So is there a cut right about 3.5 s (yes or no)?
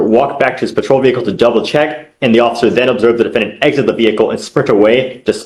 no